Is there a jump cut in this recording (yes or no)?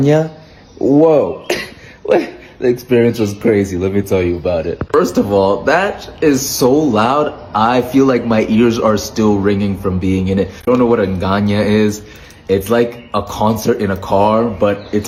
no